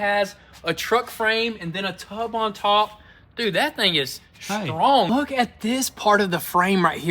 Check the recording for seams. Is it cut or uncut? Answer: cut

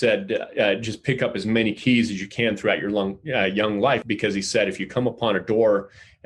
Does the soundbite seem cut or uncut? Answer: cut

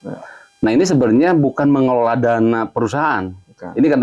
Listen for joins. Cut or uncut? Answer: uncut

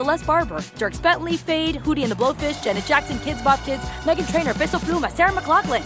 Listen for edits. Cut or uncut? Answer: uncut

